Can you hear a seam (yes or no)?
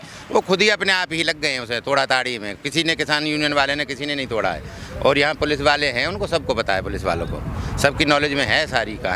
no